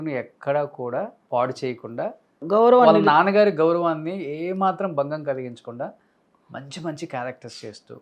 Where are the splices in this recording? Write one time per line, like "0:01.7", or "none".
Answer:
0:01.2
0:02.4